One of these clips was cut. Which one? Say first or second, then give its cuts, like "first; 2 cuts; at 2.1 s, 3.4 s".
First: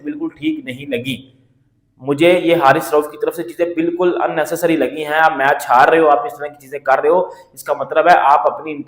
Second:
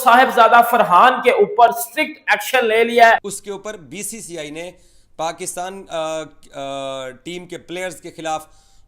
second; 1 cut; at 3.3 s